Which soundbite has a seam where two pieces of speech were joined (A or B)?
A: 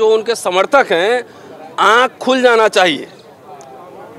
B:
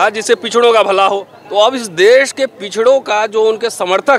B